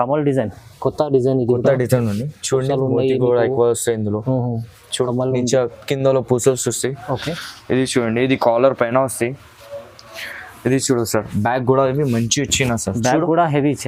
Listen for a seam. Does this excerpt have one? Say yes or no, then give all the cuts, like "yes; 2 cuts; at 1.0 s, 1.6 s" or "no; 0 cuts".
no; 0 cuts